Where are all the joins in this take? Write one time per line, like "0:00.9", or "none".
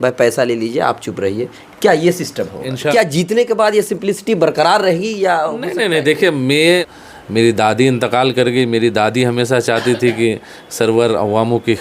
0:02.9
0:06.9